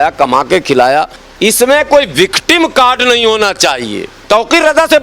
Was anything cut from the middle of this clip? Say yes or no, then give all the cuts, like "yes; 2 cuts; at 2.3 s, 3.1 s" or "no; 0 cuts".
yes; 2 cuts; at 1.2 s, 4.1 s